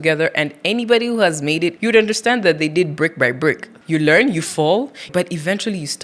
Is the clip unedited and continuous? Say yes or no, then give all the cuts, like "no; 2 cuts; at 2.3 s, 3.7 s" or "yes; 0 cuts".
no; 3 cuts; at 1.8 s, 3.7 s, 5.1 s